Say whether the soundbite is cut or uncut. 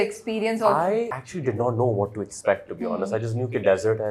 cut